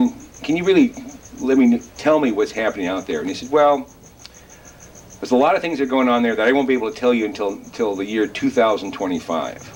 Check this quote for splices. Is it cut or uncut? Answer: uncut